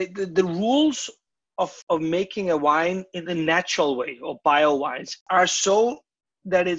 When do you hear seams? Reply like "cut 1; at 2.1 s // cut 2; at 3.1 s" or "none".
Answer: cut 1; at 1.8 s // cut 2; at 5.2 s